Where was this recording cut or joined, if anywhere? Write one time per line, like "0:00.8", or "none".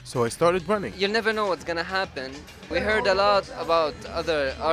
0:00.9
0:02.7
0:03.5